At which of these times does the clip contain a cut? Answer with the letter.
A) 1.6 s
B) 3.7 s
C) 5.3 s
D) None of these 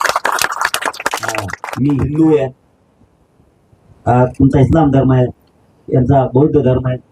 A